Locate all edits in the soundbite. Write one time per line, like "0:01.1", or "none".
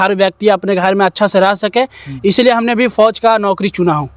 none